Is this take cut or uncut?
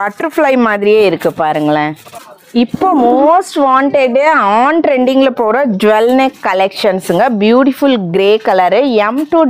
uncut